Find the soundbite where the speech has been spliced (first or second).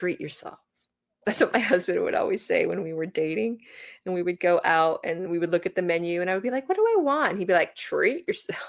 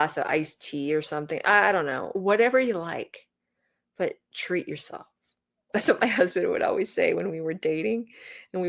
second